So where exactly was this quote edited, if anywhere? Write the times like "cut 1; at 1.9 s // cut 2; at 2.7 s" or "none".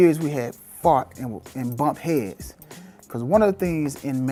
none